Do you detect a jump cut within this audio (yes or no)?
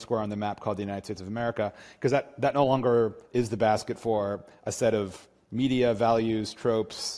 no